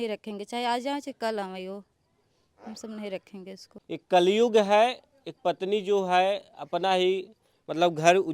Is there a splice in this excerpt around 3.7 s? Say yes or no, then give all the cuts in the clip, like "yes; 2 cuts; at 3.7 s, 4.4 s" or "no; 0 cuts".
yes; 1 cut; at 3.7 s